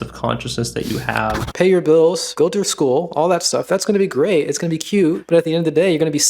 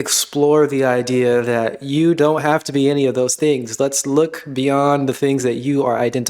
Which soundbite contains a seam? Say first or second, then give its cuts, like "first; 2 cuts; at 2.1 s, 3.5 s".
first; 2 cuts; at 1.4 s, 2.2 s